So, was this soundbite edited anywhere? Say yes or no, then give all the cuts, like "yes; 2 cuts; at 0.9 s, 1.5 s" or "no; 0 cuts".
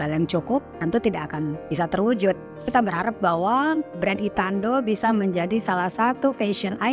yes; 2 cuts; at 1.6 s, 2.7 s